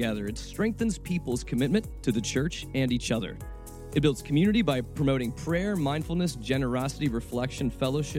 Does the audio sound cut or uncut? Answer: uncut